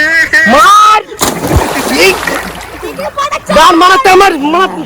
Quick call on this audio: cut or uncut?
uncut